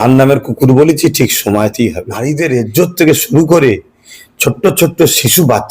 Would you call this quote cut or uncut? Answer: cut